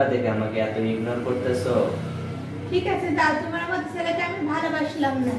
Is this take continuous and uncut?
yes; 0 cuts

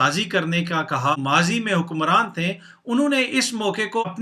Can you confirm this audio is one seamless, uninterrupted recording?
no; 1 cut; at 1.2 s

